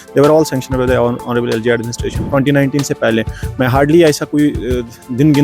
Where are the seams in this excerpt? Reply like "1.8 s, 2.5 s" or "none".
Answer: 2.2 s